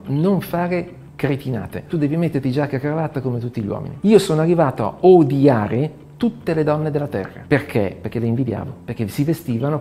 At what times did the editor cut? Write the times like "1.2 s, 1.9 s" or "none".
none